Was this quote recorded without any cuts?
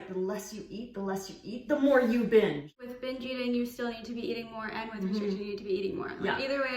no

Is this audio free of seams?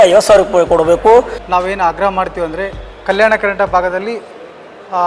no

